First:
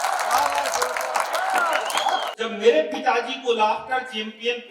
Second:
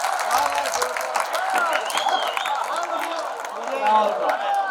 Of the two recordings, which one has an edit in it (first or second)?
first